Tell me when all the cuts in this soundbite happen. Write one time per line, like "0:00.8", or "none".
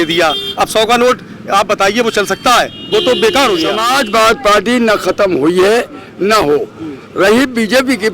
0:03.8